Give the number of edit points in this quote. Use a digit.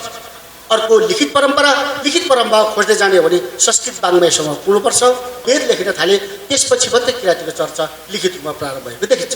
1